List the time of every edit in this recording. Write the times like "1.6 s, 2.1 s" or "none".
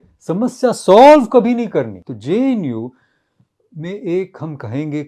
2.0 s